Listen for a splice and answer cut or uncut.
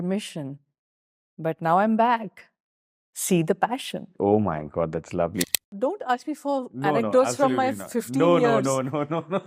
cut